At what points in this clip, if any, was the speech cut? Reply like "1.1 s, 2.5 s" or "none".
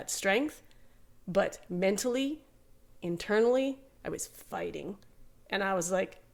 none